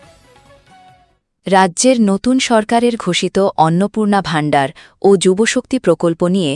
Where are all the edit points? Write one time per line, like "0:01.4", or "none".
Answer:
0:01.2